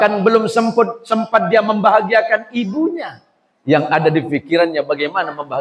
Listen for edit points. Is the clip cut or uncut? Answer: uncut